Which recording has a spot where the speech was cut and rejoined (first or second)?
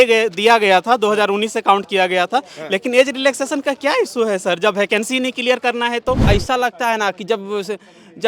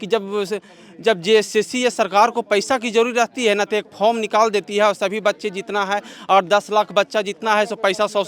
first